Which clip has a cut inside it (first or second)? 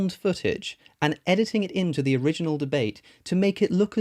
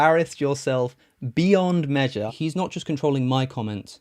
second